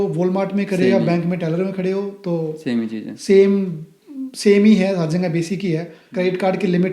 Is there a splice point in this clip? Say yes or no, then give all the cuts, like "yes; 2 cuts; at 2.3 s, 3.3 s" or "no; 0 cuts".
yes; 1 cut; at 6.0 s